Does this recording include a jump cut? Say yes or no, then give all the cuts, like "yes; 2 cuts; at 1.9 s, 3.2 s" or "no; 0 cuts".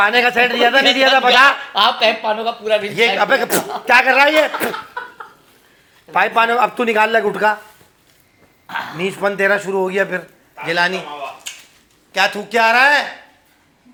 no; 0 cuts